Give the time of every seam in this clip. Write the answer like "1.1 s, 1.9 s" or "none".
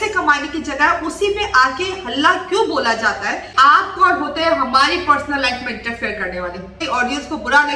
3.5 s, 6.8 s